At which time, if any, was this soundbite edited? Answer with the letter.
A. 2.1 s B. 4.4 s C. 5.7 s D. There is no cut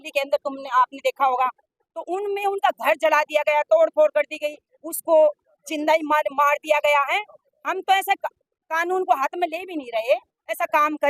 D